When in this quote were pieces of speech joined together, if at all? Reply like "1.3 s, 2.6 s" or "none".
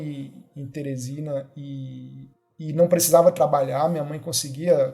none